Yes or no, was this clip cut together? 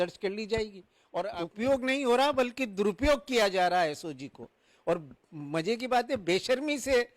yes